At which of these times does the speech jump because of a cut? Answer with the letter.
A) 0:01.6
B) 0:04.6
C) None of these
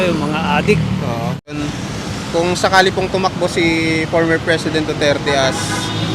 A